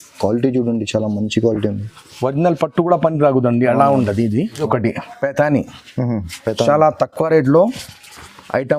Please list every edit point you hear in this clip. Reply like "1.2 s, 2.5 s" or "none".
4.6 s